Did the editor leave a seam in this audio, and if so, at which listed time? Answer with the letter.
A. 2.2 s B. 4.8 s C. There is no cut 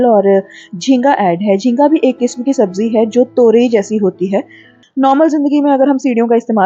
B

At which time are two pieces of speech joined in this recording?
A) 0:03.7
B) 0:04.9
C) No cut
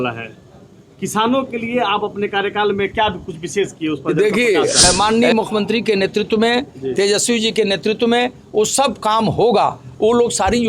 B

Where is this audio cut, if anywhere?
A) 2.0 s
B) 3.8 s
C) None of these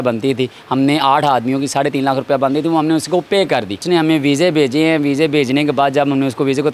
B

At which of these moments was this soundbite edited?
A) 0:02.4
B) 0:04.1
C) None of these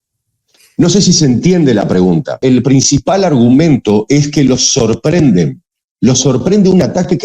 A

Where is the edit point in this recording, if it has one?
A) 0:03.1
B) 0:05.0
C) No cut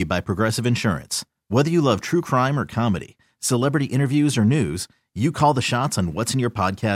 C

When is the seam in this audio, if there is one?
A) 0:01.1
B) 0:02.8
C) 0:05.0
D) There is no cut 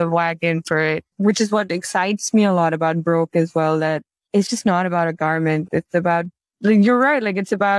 A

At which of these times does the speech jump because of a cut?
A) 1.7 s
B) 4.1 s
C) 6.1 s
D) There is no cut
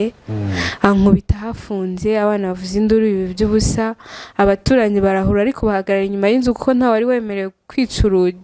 D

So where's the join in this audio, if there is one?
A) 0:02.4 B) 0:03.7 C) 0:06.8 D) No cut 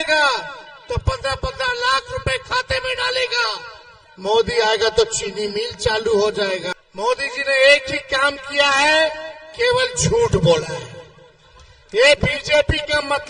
C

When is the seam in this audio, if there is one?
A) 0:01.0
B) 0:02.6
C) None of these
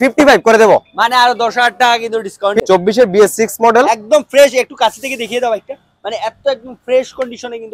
B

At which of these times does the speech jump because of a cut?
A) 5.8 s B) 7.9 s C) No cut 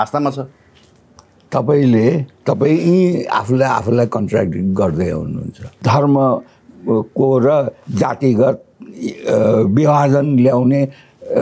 A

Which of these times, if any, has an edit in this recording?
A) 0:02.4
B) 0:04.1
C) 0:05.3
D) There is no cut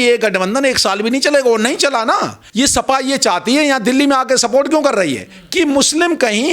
A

